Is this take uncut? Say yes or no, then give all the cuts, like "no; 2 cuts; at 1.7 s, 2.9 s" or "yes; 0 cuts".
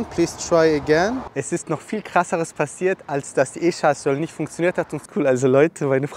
no; 2 cuts; at 1.3 s, 5.0 s